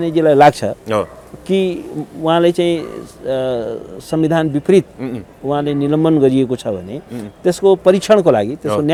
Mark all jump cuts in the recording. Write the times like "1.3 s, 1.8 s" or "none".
none